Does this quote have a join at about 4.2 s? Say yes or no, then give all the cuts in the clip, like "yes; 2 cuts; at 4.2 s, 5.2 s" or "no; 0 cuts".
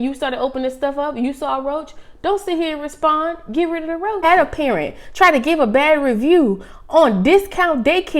yes; 1 cut; at 4.2 s